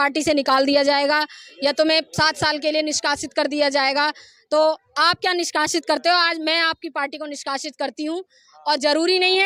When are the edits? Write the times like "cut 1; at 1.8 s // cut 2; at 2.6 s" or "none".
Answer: none